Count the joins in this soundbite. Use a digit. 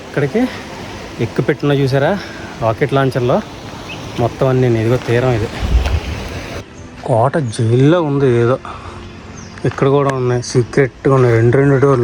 1